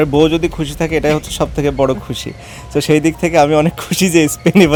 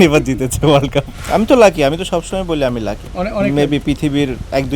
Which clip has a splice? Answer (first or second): second